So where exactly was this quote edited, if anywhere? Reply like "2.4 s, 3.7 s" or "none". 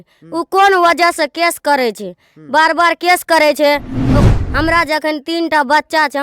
4.1 s